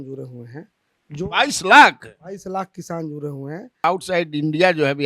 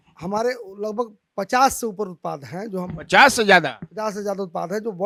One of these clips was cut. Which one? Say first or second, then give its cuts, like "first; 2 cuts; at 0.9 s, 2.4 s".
first; 1 cut; at 3.8 s